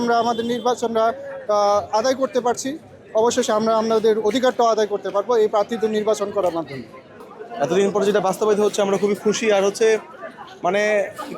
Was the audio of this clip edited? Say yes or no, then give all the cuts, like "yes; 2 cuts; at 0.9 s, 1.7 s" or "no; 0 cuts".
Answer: no; 0 cuts